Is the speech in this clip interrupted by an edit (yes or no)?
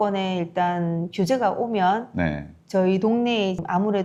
no